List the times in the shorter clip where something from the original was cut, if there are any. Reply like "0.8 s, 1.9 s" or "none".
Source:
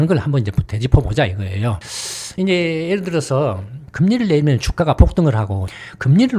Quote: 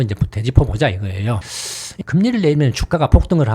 1.8 s